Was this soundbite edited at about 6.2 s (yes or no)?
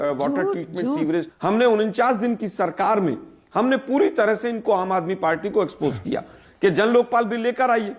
no